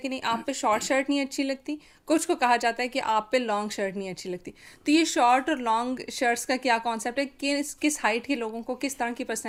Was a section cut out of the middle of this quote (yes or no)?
no